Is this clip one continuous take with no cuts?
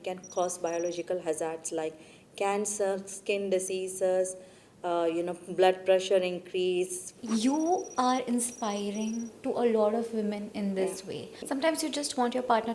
no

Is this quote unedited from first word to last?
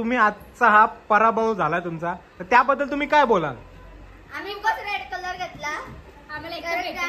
yes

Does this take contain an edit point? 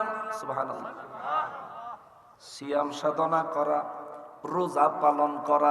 no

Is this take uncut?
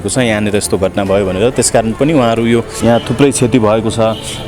no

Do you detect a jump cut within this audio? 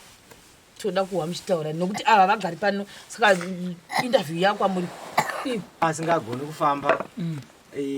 yes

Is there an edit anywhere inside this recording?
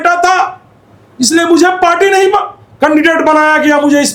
no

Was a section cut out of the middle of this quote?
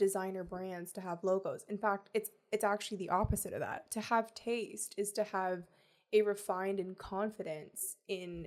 no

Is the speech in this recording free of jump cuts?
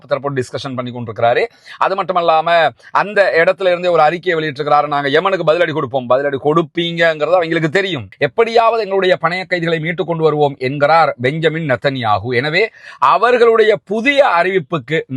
no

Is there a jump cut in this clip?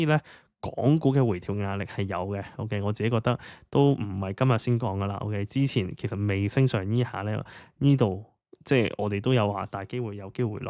no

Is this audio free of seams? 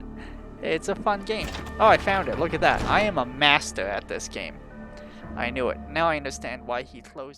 yes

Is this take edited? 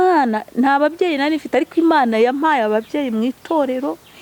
no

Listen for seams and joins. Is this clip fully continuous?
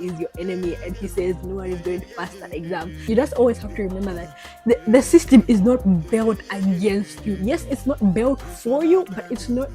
no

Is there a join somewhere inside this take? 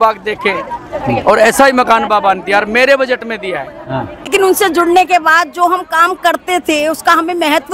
yes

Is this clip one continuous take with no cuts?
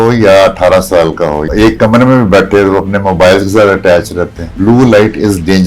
no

